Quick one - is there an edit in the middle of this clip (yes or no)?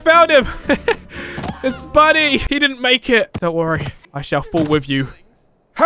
no